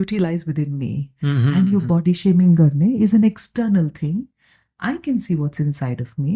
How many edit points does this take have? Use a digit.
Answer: 0